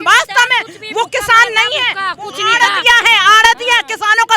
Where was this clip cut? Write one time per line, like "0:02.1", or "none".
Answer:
none